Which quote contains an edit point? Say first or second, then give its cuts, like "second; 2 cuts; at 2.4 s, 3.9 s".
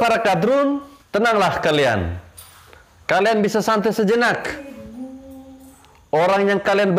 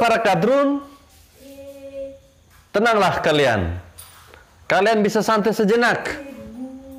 first; 1 cut; at 0.9 s